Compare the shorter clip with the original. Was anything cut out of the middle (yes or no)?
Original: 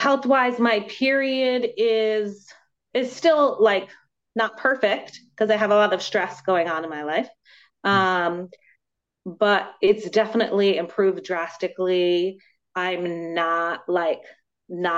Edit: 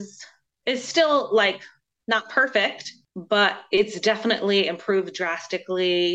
yes